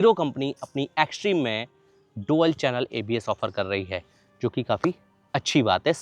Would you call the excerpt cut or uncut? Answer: uncut